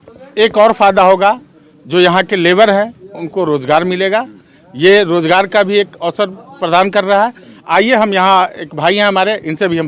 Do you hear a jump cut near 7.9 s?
no; 0 cuts

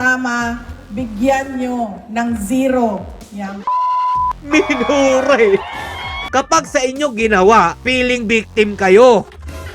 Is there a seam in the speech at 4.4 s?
yes; 2 cuts; at 4.4 s, 6.2 s

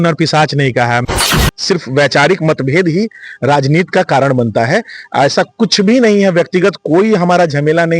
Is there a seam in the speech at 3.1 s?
no; 1 cut; at 1.2 s

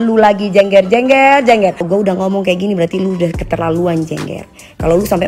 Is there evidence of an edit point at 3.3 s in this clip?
no; 1 cut; at 1.9 s

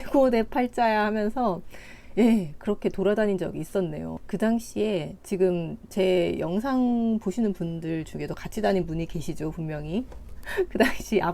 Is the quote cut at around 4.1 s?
yes; 1 cut; at 4.1 s

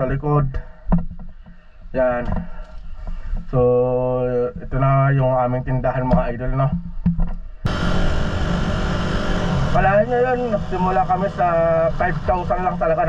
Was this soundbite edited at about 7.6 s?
yes; 1 cut; at 7.6 s

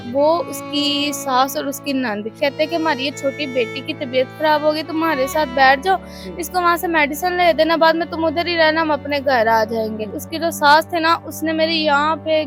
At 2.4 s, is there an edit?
yes; 2 cuts; at 2.4 s, 10.2 s

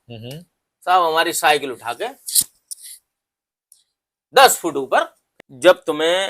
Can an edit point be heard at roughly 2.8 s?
no; 1 cut; at 5.2 s

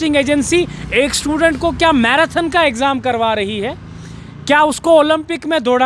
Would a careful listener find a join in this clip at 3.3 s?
no; 0 cuts

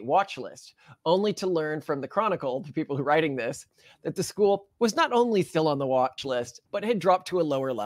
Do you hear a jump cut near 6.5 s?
yes; 1 cut; at 6.5 s

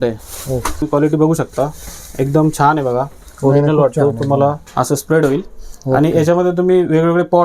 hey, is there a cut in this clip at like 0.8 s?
yes; 2 cuts; at 0.8 s, 4.6 s

